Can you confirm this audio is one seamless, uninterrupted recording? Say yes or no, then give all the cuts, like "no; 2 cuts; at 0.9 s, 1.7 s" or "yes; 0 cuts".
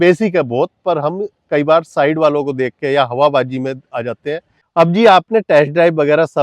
no; 1 cut; at 4.5 s